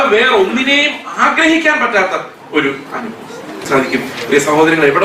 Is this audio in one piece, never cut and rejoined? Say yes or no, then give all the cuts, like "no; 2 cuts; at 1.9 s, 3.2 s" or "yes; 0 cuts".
no; 1 cut; at 3.7 s